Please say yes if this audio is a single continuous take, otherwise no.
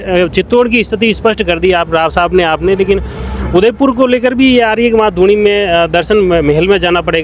yes